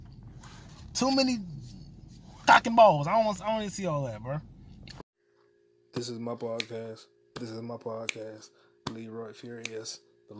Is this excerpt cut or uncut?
cut